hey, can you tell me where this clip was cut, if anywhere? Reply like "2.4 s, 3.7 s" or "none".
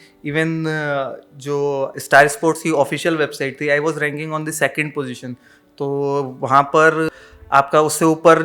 7.1 s